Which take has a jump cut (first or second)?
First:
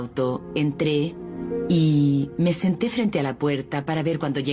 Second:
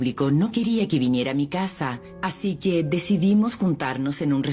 second